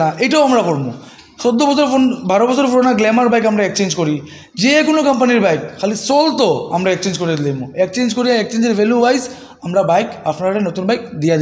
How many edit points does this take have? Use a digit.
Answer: 0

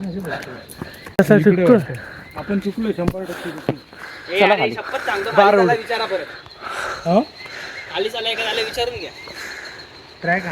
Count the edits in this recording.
1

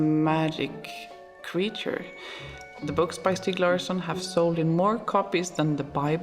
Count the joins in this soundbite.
1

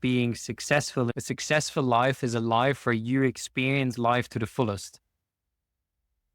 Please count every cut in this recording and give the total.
1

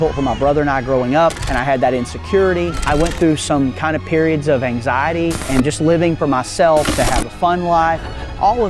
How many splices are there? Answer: 4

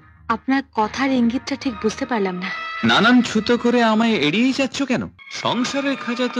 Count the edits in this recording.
1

